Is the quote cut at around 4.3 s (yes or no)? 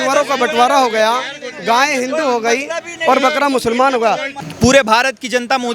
yes